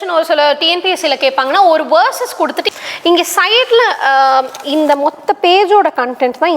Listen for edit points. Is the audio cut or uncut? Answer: cut